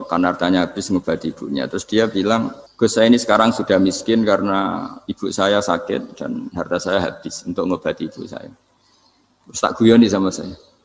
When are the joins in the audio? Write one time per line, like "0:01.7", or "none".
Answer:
0:02.6